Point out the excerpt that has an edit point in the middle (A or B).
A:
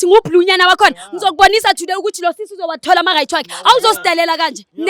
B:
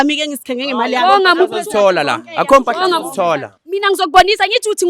B